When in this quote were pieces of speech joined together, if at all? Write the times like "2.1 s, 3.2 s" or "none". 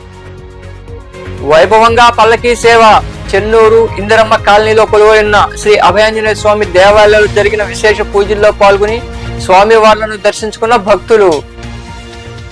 1.4 s